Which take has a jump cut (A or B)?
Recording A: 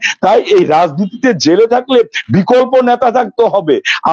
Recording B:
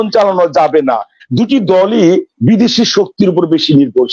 B